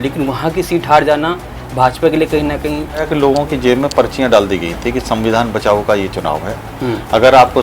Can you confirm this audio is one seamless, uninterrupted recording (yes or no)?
no